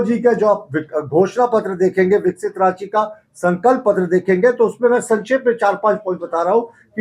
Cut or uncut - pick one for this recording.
uncut